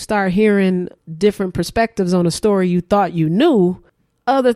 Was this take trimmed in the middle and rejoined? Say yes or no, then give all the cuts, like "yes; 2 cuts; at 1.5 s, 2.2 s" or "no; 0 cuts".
yes; 1 cut; at 1.0 s